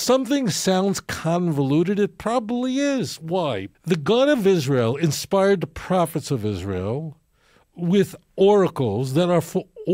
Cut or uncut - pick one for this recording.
cut